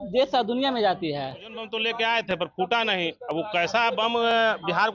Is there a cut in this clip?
yes; 1 cut; at 1.7 s

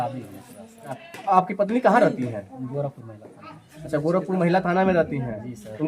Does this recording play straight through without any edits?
no; 1 cut; at 1.1 s

